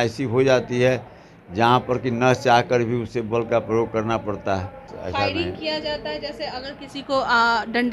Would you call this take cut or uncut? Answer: cut